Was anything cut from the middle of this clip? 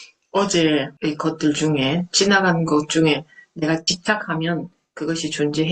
yes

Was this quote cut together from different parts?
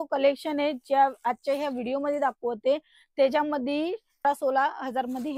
yes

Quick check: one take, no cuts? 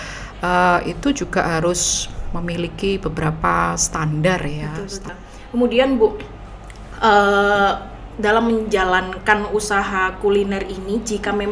no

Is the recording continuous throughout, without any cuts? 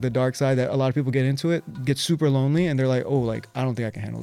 yes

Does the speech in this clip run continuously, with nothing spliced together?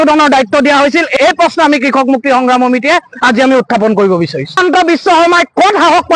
no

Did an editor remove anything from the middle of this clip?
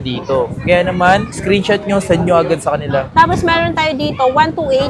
no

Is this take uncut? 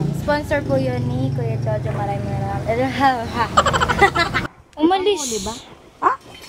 no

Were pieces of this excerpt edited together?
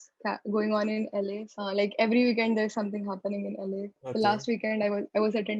yes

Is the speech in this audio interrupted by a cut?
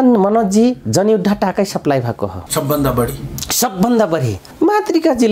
yes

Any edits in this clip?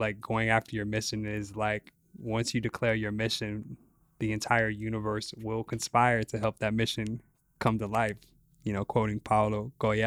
no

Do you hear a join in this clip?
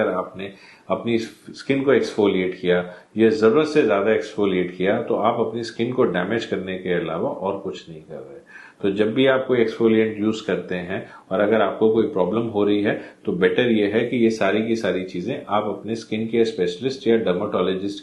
no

